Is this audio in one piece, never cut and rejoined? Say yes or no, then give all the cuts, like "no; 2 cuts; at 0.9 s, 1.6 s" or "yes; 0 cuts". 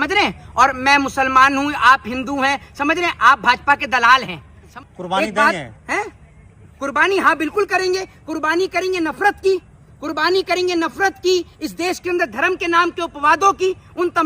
no; 1 cut; at 4.7 s